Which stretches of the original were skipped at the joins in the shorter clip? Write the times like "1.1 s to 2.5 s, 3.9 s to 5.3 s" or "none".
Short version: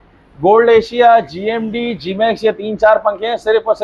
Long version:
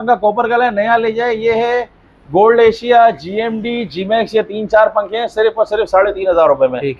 none